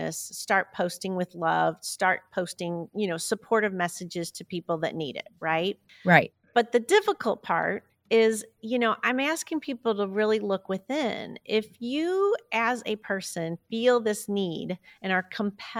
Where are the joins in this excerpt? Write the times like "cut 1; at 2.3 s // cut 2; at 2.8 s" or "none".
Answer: cut 1; at 5.9 s // cut 2; at 7.9 s